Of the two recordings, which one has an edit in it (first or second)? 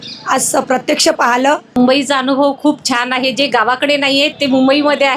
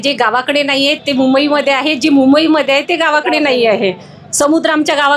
first